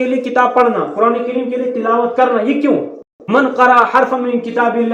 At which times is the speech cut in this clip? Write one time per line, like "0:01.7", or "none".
0:03.1